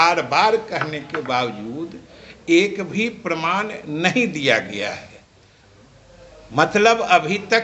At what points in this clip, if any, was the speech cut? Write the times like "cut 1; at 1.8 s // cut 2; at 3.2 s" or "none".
none